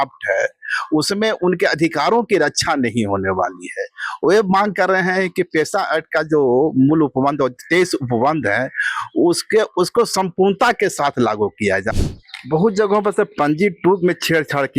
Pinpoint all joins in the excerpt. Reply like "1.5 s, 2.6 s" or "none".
11.9 s